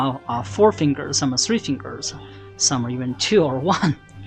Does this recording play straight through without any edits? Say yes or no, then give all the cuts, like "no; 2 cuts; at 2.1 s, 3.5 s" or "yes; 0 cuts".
yes; 0 cuts